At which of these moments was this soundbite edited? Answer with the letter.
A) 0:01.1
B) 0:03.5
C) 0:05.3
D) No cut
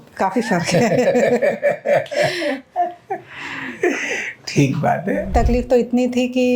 C